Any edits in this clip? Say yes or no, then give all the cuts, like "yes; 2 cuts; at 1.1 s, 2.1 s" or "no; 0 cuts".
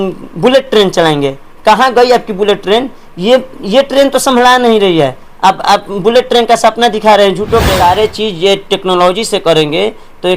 yes; 1 cut; at 7.7 s